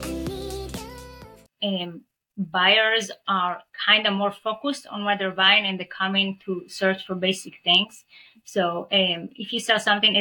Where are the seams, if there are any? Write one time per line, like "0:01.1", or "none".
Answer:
0:01.2